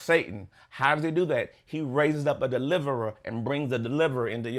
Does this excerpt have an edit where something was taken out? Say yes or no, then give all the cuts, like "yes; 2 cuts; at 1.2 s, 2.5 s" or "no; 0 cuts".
no; 0 cuts